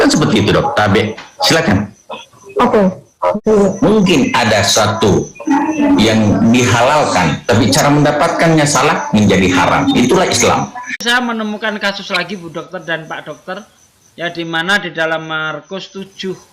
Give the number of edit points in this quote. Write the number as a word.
two